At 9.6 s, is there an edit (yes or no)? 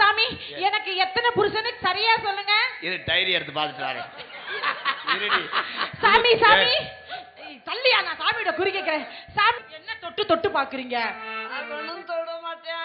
yes